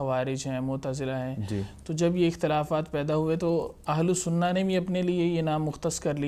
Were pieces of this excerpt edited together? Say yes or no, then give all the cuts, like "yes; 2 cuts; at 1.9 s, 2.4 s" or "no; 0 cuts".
no; 0 cuts